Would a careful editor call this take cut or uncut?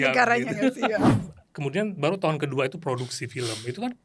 cut